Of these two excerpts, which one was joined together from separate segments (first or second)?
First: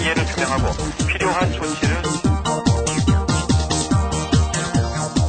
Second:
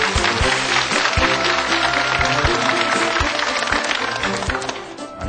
second